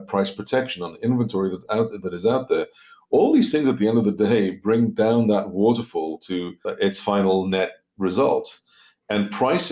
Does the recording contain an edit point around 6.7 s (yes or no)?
yes